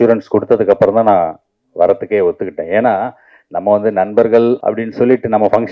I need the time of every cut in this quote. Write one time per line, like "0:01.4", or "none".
0:04.6